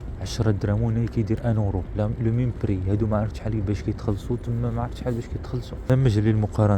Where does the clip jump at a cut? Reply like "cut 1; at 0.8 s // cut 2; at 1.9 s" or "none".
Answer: cut 1; at 5.9 s